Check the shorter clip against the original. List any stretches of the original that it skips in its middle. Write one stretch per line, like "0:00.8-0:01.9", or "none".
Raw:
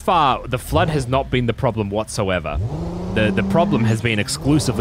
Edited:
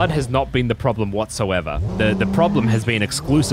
0:02.6-0:03.0

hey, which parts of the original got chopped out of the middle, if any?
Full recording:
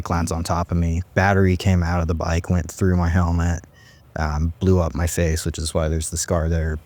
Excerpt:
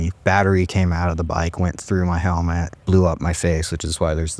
0:03.7-0:04.5

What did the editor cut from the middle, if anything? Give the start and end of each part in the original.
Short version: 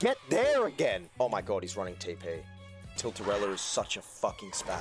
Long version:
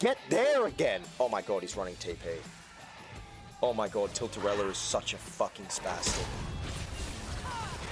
0:03.0-0:04.1

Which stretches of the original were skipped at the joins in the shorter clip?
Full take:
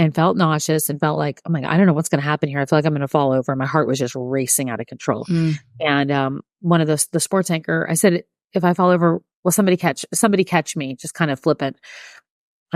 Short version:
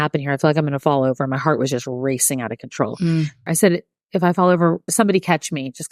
0:05.7-0:07.9
0:09.3-0:10.1

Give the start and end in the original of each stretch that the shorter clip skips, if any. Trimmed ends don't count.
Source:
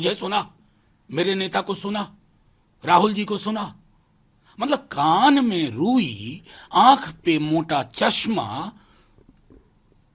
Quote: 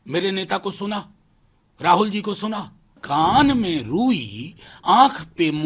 0:04.0-0:04.9

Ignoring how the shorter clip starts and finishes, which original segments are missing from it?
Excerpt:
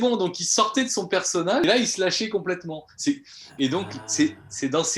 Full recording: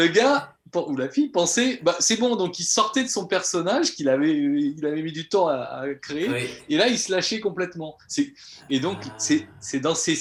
0:03.8-0:06.7

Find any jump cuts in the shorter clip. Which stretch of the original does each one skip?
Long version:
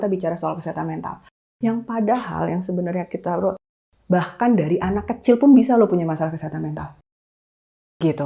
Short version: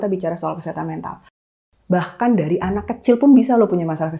0:01.5-0:03.7

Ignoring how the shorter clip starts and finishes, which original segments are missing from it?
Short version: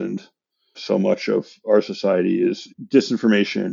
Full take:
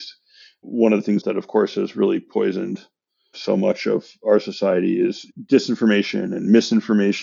none

